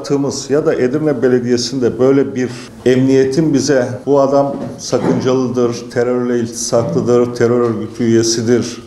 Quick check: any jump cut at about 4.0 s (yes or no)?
yes